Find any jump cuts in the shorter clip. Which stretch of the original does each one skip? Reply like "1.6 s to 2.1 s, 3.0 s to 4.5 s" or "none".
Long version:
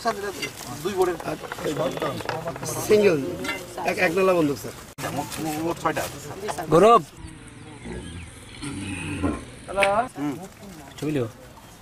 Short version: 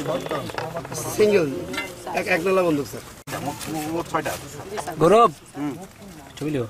7.2 s to 10.1 s